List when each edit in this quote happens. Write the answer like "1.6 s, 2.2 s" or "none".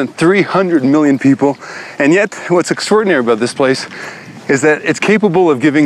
3.0 s

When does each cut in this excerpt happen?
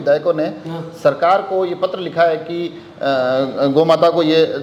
none

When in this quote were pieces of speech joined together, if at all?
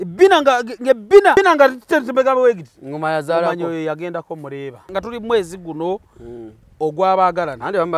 1.4 s, 4.9 s

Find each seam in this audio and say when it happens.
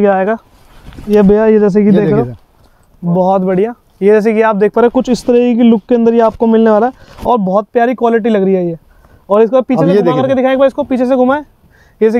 none

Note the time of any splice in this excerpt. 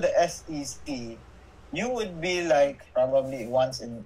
2.8 s

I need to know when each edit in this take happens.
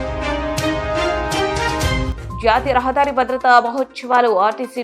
2.1 s

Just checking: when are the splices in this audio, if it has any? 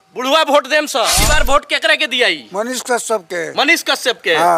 1.2 s

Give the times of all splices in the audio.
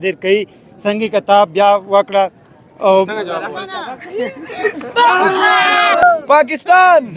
6.0 s

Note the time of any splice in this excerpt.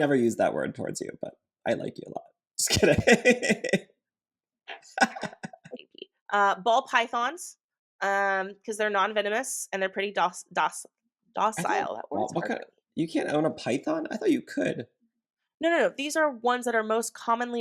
5.7 s

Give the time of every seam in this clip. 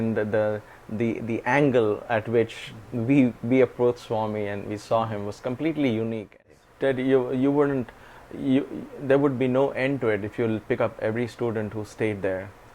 6.5 s

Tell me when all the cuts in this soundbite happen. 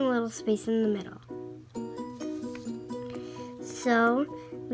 none

